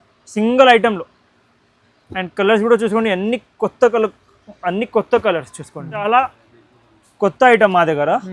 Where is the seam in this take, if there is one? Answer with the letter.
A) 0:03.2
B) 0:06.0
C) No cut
B